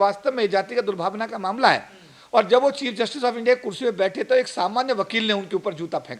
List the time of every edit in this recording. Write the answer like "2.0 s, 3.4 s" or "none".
none